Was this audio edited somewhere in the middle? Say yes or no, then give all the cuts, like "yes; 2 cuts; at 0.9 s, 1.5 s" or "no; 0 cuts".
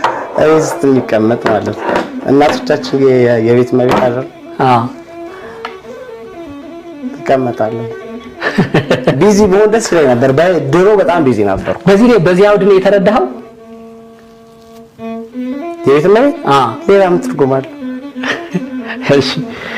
no; 0 cuts